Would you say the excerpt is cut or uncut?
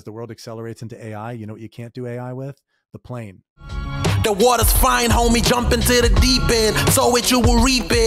cut